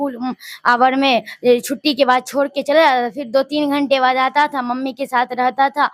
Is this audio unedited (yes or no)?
yes